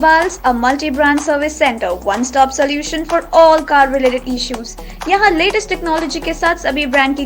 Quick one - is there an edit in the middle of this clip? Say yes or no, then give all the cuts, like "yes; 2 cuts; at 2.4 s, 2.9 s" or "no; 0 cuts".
no; 0 cuts